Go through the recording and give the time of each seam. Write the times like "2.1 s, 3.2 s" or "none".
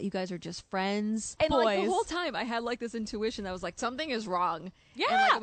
1.4 s